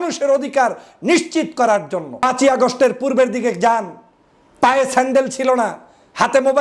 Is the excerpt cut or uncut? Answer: cut